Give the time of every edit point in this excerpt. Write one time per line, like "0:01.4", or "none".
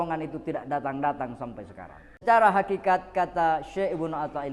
0:02.2

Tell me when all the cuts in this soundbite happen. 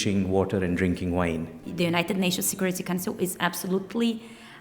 0:01.6

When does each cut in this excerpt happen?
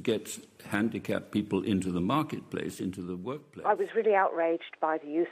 0:03.5

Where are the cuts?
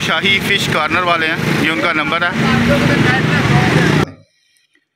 0:04.1

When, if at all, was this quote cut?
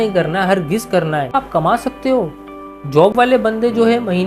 0:01.3

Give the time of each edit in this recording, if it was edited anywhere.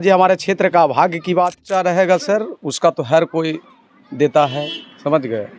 0:01.6

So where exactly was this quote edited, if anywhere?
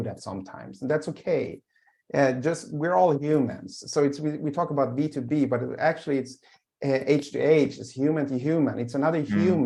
none

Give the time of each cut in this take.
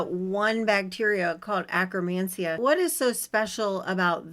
0:02.6

